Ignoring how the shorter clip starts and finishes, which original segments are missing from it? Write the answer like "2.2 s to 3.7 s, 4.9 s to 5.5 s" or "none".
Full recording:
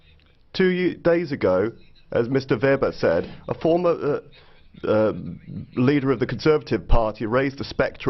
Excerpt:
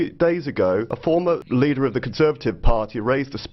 1.9 s to 5.3 s